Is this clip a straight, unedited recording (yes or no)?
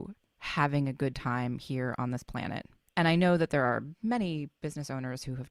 no